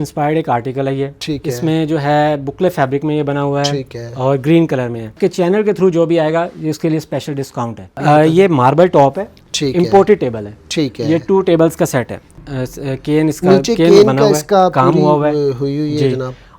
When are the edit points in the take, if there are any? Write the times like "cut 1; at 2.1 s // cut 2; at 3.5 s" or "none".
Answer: cut 1; at 5.2 s // cut 2; at 7.9 s // cut 3; at 12.4 s